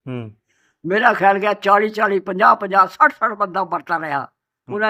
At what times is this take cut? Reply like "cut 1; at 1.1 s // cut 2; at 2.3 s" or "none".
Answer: none